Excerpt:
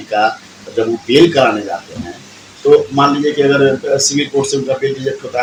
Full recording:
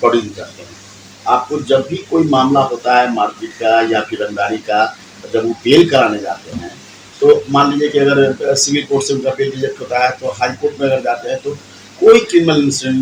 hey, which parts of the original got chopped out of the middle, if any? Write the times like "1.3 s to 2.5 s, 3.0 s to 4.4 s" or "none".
none